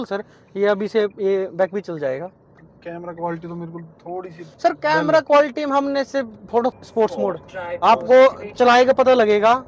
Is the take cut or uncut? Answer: cut